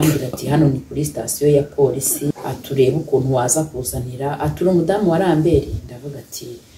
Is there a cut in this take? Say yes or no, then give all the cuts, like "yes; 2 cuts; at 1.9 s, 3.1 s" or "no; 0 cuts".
yes; 1 cut; at 2.3 s